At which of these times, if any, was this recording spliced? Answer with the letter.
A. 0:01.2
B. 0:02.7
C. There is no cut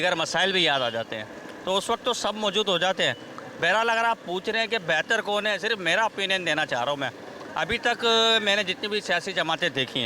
C